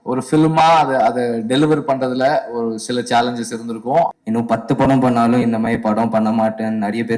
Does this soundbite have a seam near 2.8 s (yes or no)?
no